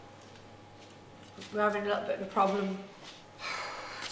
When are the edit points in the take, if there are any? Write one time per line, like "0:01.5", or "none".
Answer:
0:01.3